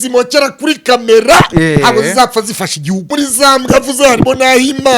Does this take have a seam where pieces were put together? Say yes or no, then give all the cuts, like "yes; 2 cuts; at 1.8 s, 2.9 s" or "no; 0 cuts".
yes; 1 cut; at 3.1 s